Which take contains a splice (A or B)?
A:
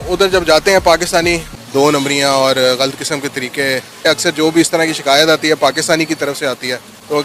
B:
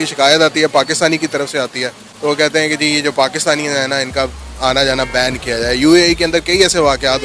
A